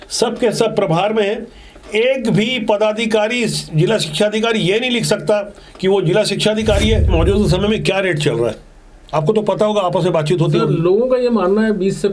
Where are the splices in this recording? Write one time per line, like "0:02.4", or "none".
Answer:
0:07.1